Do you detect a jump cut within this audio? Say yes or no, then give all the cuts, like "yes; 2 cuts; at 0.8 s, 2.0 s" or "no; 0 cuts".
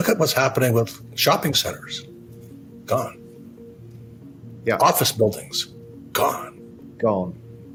no; 0 cuts